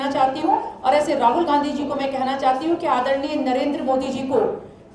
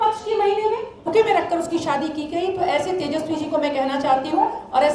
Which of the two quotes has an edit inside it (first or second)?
second